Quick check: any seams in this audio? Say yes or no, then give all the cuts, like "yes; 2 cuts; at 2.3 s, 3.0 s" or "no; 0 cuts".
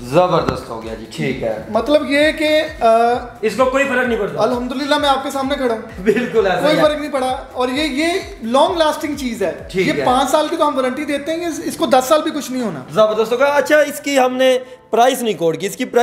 no; 0 cuts